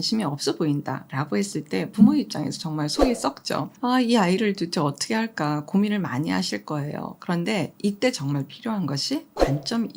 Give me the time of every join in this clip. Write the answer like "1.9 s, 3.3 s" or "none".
1.1 s, 3.7 s